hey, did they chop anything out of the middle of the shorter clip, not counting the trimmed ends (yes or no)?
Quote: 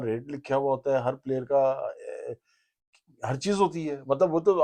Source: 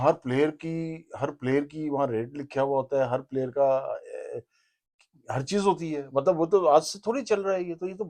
no